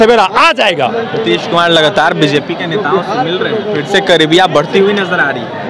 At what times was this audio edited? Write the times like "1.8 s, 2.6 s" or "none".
none